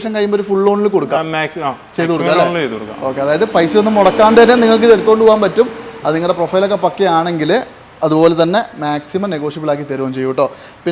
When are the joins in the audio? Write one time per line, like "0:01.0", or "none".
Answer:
none